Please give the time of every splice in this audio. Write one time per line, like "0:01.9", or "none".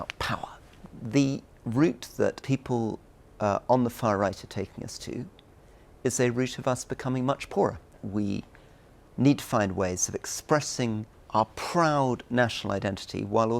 0:00.8
0:02.4
0:08.0
0:11.1